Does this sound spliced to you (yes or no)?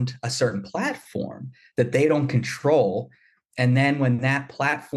no